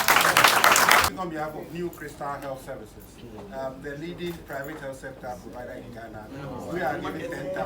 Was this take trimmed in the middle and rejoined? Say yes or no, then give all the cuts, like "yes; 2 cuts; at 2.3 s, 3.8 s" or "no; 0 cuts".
yes; 1 cut; at 1.1 s